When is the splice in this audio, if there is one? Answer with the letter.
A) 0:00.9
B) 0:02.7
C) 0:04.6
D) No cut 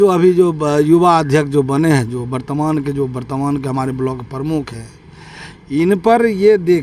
D